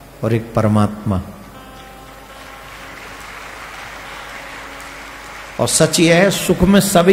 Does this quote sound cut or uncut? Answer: uncut